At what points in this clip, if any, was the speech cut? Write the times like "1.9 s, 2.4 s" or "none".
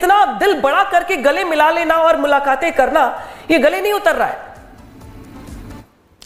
none